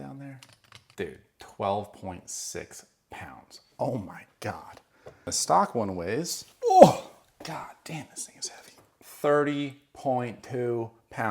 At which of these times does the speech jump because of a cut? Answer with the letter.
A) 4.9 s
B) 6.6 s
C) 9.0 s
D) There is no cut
C